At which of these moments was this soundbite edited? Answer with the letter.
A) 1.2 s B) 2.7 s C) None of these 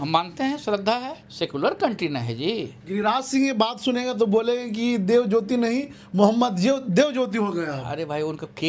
A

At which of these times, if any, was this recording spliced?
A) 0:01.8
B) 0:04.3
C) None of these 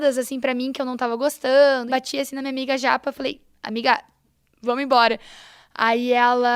A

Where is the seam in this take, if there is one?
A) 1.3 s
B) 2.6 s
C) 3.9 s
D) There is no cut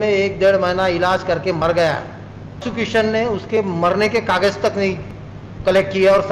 B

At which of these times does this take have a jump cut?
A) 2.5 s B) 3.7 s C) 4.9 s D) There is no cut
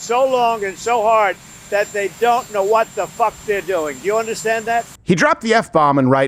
C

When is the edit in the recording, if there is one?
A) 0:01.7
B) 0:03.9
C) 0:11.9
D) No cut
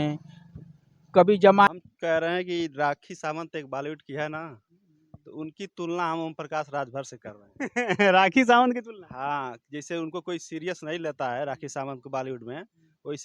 A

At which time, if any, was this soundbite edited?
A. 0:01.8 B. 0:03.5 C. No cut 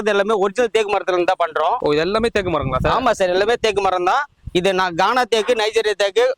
A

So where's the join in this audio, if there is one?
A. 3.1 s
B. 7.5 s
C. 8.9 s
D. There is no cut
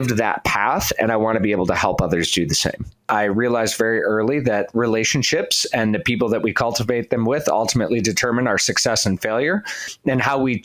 A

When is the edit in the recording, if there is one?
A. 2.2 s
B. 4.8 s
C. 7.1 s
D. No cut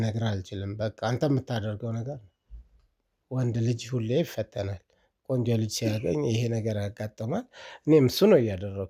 D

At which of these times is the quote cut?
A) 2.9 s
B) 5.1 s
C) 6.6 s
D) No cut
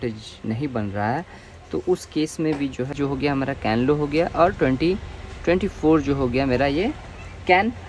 A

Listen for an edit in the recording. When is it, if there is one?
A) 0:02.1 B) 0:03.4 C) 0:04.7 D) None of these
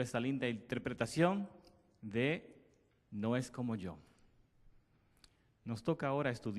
D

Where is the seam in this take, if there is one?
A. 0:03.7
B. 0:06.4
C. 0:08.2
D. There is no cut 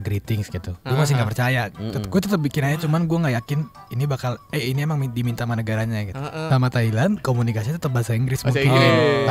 B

